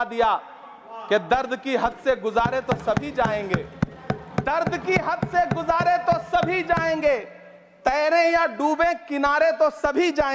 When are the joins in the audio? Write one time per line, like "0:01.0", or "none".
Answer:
none